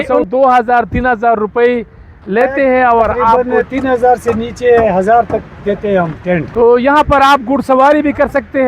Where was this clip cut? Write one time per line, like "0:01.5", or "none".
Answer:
0:03.5
0:06.5